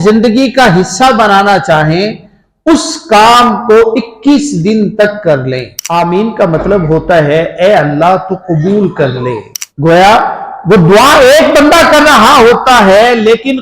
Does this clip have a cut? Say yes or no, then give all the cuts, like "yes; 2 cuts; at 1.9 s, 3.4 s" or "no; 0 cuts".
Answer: yes; 2 cuts; at 5.7 s, 9.5 s